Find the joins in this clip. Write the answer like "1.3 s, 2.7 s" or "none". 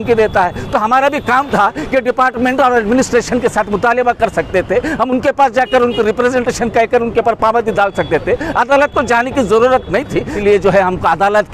10.3 s

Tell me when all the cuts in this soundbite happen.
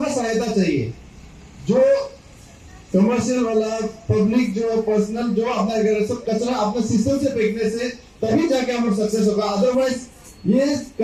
none

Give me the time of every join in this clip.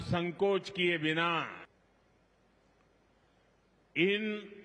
1.7 s

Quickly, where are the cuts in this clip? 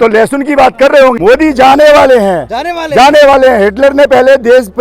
1.2 s

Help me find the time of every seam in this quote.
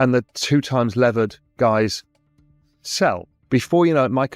3.3 s

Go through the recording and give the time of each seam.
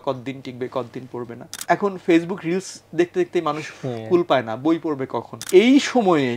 1.5 s, 5.3 s

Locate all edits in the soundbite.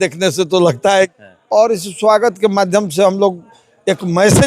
1.1 s

